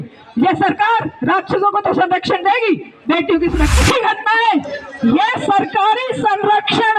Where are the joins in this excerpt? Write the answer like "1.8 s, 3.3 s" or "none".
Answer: 3.8 s